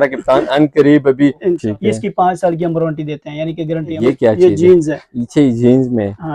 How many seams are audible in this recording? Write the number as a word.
two